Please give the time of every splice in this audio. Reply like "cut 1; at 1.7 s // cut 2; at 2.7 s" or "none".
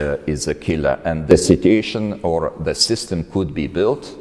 cut 1; at 1.3 s

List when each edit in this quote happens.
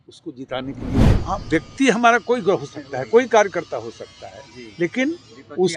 cut 1; at 1.1 s

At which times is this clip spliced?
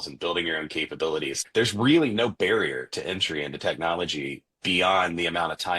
cut 1; at 1.4 s

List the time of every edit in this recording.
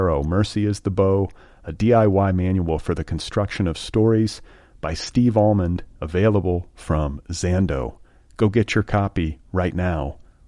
none

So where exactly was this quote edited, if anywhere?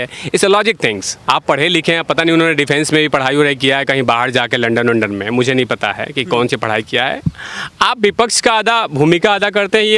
none

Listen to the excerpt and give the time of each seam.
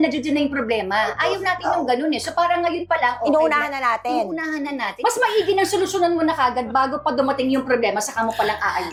none

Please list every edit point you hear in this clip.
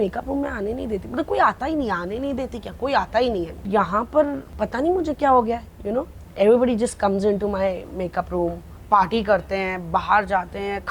cut 1; at 3.7 s // cut 2; at 4.5 s // cut 3; at 8.7 s

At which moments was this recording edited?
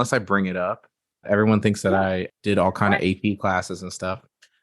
cut 1; at 1.2 s // cut 2; at 2.3 s

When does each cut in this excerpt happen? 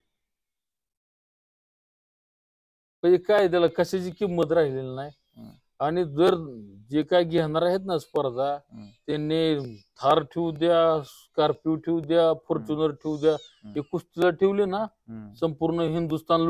none

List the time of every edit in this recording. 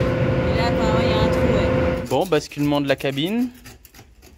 cut 1; at 2.0 s

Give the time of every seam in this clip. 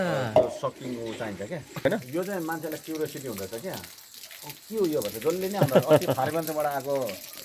cut 1; at 1.8 s

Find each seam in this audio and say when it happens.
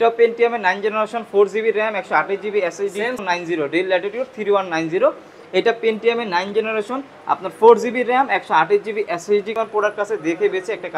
cut 1; at 3.2 s // cut 2; at 9.5 s

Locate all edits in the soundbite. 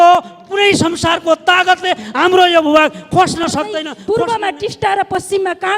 cut 1; at 3.9 s

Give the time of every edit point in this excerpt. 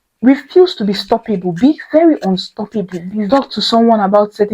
cut 1; at 3.3 s

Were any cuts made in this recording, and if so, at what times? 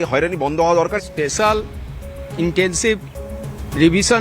cut 1; at 1.0 s

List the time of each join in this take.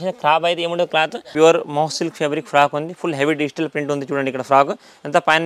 cut 1; at 1.3 s

